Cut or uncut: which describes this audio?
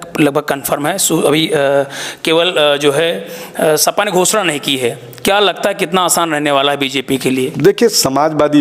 uncut